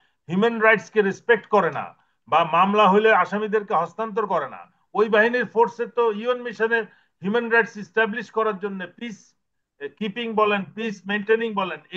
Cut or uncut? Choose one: uncut